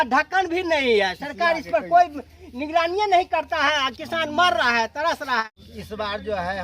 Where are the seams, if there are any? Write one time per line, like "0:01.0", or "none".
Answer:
0:05.4